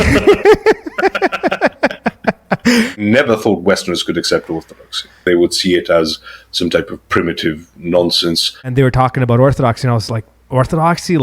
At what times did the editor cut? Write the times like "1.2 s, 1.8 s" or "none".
3.0 s, 5.2 s, 8.6 s